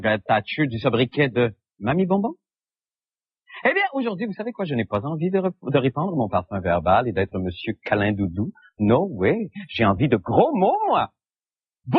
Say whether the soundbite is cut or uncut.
cut